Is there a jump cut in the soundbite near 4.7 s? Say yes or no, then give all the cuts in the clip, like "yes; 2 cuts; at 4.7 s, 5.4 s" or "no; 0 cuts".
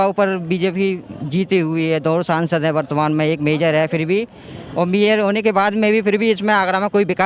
no; 0 cuts